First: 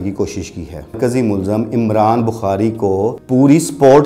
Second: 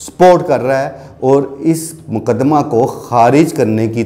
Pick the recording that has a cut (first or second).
first